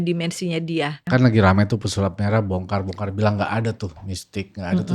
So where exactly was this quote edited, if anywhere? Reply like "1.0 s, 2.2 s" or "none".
1.0 s

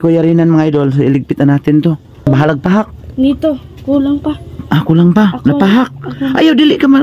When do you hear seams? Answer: 2.3 s

